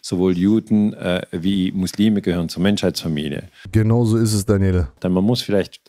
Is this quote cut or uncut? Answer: cut